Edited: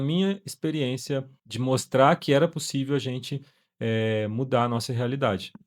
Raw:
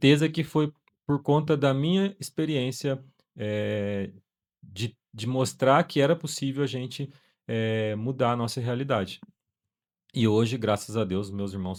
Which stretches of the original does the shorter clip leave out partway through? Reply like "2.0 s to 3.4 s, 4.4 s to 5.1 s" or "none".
3.2 s to 5.1 s